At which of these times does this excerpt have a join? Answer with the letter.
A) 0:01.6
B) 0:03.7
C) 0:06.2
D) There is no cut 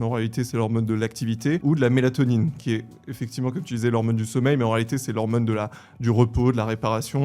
A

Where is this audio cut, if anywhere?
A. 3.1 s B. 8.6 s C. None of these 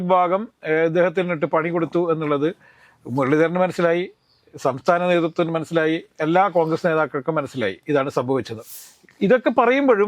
B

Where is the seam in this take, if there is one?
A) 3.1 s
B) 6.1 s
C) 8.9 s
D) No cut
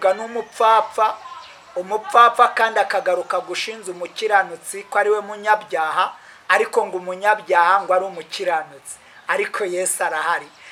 D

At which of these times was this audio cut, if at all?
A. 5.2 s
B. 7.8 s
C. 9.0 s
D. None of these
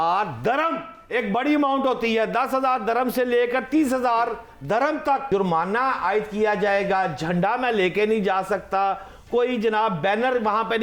A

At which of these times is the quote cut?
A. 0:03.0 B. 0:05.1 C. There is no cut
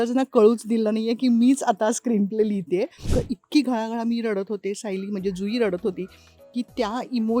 A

